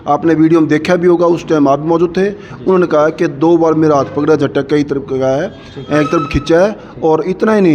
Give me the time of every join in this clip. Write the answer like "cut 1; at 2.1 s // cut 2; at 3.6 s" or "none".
none